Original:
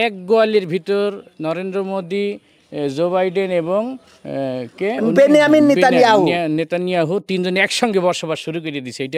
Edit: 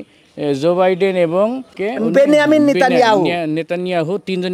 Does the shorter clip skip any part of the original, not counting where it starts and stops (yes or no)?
yes